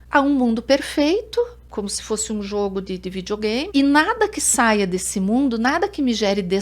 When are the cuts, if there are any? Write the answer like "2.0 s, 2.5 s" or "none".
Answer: 1.6 s, 3.7 s

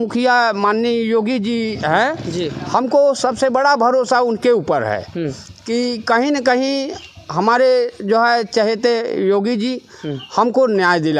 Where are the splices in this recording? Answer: none

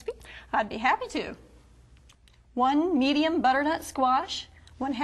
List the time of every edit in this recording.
4.0 s

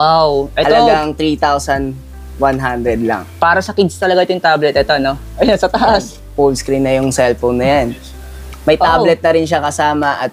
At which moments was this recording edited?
5.3 s

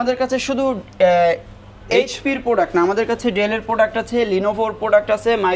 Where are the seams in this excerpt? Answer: none

